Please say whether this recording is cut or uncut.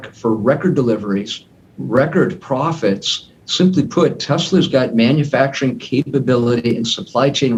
uncut